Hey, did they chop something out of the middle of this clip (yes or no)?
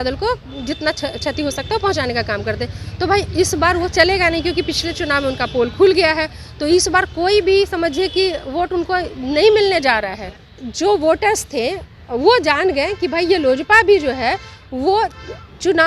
yes